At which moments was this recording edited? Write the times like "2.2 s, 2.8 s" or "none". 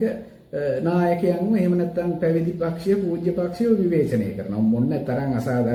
none